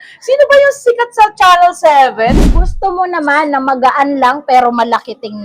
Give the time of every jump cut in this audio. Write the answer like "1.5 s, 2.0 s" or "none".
2.7 s